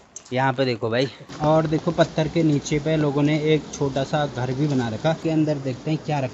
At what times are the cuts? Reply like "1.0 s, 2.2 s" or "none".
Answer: 1.3 s, 5.2 s